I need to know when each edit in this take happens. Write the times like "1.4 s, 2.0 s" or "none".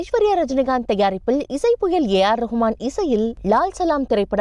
none